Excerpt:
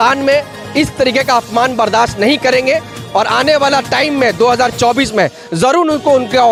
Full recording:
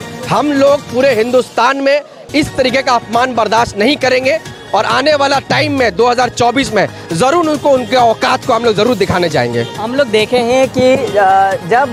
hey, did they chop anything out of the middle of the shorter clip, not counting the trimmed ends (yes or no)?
no